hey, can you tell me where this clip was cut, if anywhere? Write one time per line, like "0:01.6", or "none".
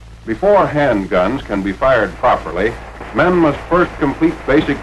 none